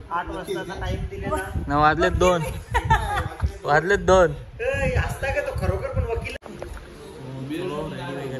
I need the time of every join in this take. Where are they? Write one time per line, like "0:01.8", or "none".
0:06.3